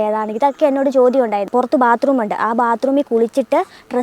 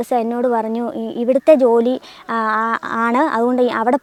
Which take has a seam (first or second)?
first